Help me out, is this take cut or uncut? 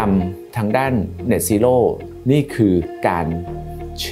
cut